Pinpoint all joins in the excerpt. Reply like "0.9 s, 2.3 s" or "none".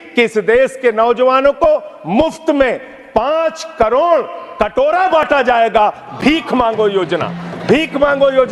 none